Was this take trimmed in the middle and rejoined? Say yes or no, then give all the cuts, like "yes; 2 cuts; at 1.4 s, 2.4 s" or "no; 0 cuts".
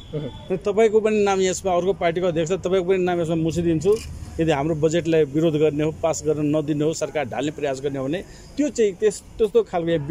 no; 0 cuts